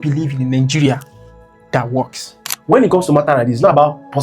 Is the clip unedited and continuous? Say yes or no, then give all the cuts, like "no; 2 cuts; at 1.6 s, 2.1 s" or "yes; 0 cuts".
no; 1 cut; at 2.5 s